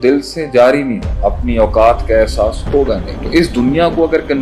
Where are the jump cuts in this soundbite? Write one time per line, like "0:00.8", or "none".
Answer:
0:01.0
0:03.1